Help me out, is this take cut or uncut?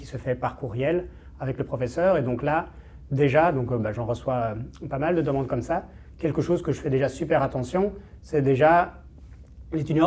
uncut